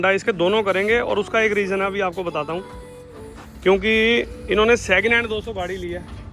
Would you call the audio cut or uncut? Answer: uncut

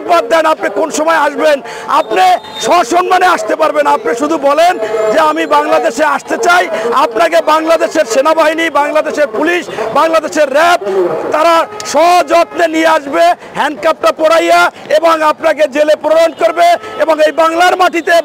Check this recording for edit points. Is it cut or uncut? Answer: uncut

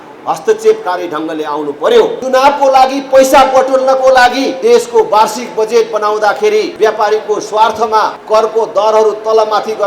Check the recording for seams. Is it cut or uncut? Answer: cut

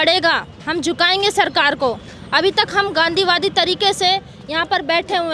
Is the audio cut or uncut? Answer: uncut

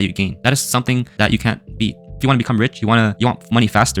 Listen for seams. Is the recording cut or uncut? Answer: cut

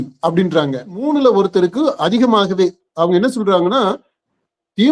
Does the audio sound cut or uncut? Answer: cut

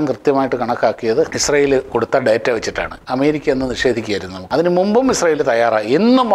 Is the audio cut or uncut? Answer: cut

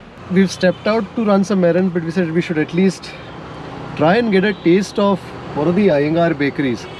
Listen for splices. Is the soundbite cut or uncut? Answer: uncut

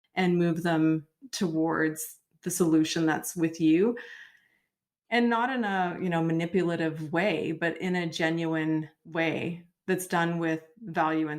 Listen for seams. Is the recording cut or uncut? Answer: cut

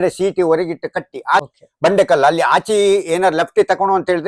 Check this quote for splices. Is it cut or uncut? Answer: cut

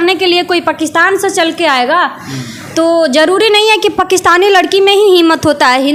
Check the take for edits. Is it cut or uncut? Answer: uncut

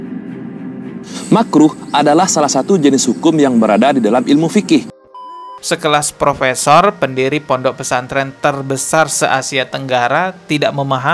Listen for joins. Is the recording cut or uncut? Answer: cut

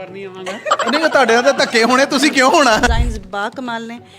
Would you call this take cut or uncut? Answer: cut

